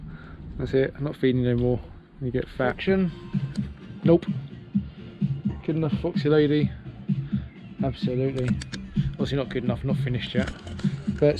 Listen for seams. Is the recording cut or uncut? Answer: cut